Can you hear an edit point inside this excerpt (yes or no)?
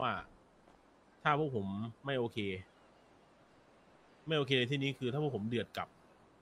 no